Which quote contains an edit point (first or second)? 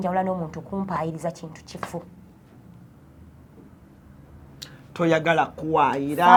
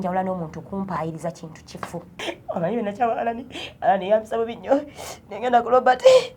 second